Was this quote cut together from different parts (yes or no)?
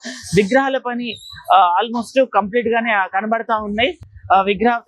no